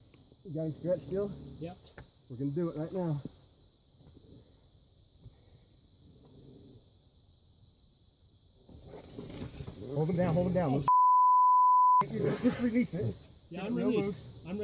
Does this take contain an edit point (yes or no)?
yes